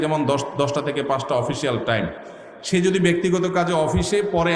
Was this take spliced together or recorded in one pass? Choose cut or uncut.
uncut